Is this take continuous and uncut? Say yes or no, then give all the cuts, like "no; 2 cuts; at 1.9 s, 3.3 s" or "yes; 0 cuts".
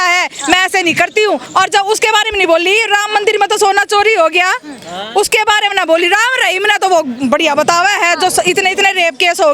no; 1 cut; at 1.5 s